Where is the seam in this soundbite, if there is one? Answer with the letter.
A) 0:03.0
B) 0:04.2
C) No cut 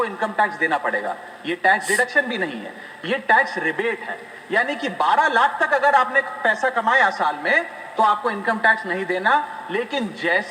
C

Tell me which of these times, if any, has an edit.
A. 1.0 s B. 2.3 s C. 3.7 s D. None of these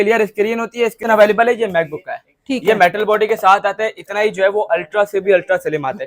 A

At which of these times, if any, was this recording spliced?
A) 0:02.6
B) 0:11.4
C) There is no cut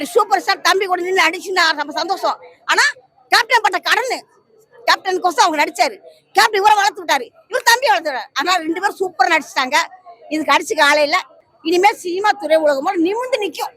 B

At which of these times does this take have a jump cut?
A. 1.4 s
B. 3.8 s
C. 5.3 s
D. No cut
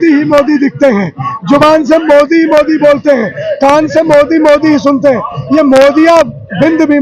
D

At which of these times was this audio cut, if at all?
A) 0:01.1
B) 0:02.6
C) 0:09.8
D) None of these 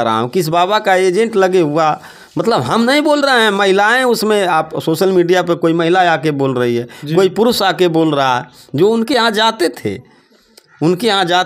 D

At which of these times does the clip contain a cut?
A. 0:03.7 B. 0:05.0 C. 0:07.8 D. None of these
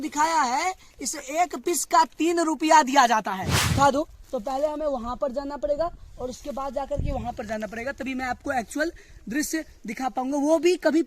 A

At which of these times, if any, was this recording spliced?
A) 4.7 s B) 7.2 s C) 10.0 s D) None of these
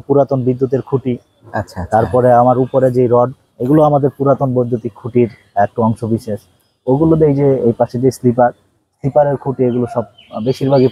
D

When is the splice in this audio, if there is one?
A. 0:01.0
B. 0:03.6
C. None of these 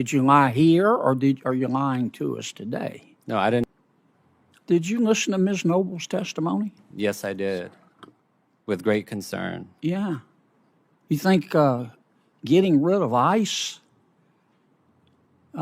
B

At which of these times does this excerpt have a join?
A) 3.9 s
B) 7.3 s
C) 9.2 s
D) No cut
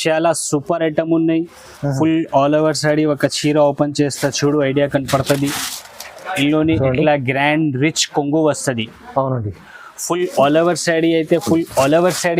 D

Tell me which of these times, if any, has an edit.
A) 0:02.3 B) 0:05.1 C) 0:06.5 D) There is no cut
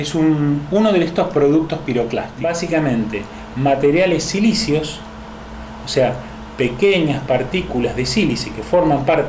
A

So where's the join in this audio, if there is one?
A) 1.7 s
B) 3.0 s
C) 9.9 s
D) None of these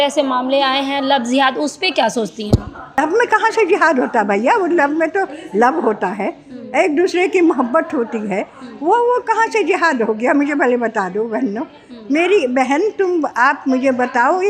B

